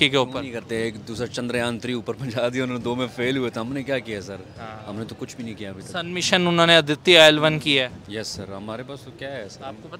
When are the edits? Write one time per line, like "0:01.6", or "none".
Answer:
none